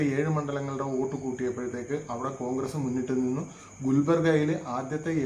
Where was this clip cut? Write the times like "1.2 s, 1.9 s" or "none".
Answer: none